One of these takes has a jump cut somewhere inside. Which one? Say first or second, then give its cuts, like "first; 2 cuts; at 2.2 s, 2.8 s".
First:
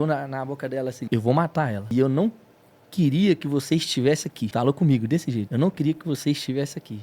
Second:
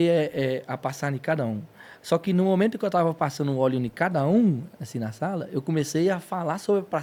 first; 4 cuts; at 1.0 s, 1.9 s, 4.5 s, 5.5 s